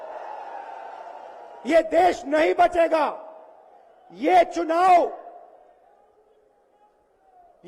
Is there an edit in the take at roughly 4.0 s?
no; 0 cuts

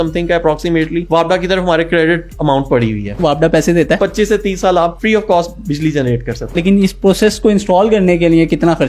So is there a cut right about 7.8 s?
no; 5 cuts; at 1.0 s, 3.2 s, 4.0 s, 5.0 s, 6.6 s

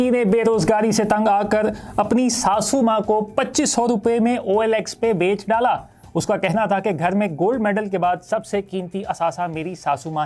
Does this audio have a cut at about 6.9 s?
no; 0 cuts

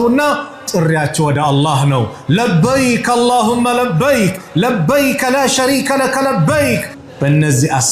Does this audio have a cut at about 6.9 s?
yes; 1 cut; at 6.9 s

